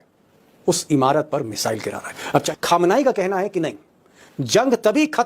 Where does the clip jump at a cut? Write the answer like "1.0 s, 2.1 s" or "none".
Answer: 2.5 s